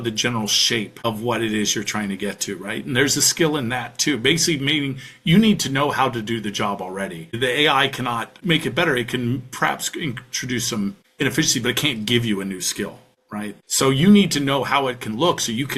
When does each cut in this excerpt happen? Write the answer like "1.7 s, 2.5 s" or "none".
0.9 s